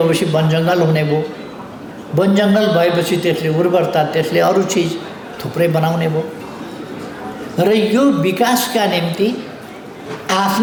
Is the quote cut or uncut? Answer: uncut